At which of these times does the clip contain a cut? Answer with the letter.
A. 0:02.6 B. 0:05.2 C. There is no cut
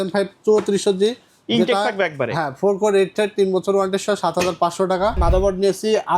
B